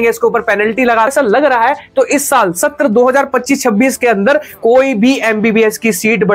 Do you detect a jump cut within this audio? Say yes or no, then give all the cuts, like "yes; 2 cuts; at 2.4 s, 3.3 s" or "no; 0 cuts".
yes; 1 cut; at 1.1 s